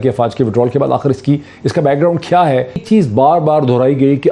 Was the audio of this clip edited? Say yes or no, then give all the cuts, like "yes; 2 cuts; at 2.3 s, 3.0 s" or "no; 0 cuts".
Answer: no; 0 cuts